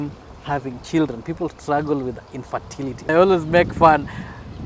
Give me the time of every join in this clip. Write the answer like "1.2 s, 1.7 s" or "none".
3.1 s